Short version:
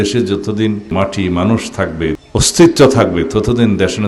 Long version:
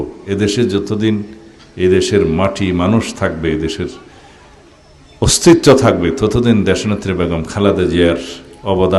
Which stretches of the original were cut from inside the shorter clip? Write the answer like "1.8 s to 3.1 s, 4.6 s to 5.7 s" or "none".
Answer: 1.3 s to 2.3 s, 3.6 s to 5.0 s